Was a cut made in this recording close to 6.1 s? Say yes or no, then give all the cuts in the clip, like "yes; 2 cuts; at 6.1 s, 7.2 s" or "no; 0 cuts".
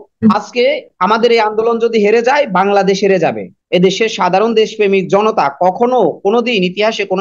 no; 1 cut; at 3.5 s